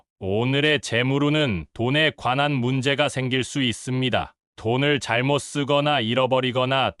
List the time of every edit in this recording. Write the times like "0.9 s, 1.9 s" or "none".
none